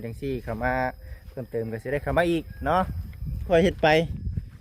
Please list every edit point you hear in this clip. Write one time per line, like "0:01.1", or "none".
0:03.5